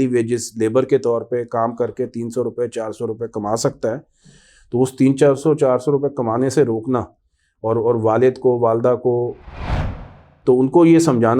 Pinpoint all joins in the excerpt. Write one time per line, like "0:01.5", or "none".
0:10.0